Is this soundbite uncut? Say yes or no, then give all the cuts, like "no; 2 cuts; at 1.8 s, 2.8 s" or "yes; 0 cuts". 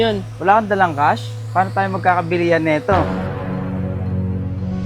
yes; 0 cuts